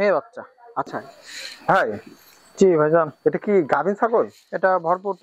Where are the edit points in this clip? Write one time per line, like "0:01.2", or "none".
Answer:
0:01.0